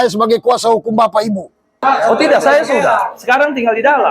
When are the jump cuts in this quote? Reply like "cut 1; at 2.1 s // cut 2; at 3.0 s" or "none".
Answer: cut 1; at 1.8 s